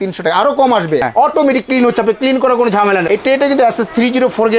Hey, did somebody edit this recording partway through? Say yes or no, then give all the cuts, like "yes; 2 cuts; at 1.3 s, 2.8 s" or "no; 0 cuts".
yes; 2 cuts; at 1.0 s, 3.1 s